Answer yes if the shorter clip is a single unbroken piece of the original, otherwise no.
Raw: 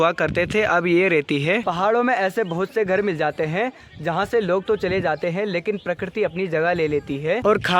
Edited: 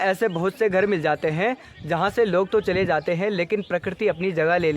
yes